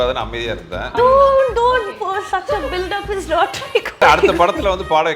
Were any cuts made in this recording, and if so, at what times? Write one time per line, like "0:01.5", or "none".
0:01.0
0:04.0